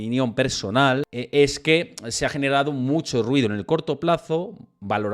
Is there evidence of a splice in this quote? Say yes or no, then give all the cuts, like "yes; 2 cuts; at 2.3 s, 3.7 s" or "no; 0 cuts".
yes; 1 cut; at 1.1 s